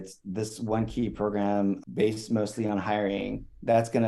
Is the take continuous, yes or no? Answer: yes